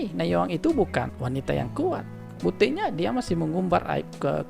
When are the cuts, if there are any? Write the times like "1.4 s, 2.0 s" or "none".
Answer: 1.1 s, 2.2 s